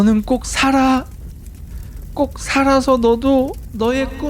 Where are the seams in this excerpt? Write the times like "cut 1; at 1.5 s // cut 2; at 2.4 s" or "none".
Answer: none